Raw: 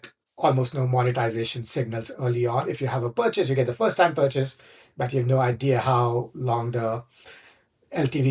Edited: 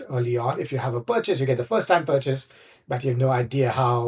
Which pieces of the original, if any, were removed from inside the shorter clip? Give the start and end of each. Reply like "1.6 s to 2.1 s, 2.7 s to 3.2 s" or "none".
none